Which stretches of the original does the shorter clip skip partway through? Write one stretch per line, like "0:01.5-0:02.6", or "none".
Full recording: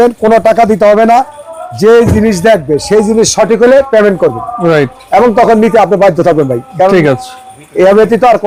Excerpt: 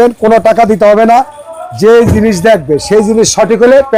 none